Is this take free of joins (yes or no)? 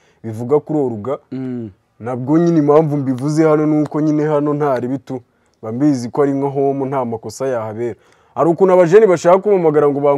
yes